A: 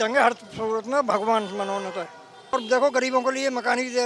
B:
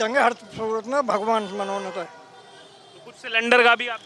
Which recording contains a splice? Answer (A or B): A